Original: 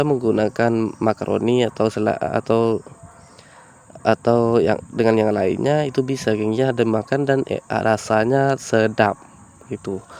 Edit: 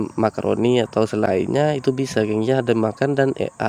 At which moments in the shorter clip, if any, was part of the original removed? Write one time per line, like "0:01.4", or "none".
0:01.3